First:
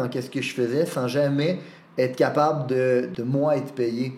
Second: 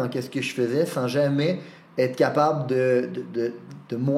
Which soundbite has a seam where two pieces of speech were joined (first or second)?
first